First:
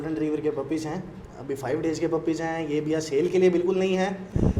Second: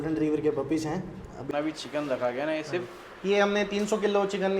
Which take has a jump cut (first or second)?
second